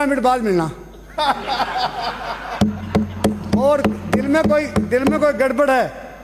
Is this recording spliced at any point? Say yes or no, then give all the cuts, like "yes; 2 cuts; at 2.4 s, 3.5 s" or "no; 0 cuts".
no; 0 cuts